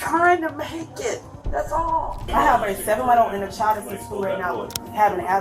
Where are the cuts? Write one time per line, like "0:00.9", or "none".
0:02.3